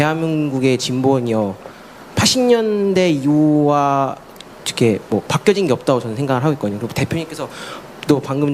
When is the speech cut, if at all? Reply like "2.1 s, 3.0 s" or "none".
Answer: none